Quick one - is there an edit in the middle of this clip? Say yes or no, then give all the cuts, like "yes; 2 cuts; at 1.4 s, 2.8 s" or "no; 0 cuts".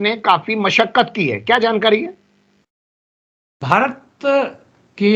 no; 0 cuts